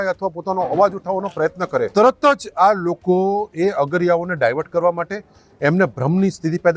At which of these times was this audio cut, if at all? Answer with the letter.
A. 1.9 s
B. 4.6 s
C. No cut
A